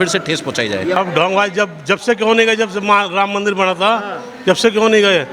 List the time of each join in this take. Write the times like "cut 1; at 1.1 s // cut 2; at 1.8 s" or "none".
cut 1; at 1.0 s